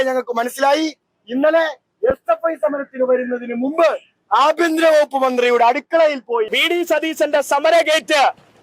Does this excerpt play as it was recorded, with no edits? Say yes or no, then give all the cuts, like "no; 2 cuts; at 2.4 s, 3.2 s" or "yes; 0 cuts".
no; 1 cut; at 6.6 s